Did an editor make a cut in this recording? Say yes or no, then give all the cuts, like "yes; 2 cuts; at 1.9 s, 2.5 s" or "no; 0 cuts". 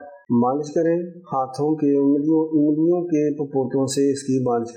no; 0 cuts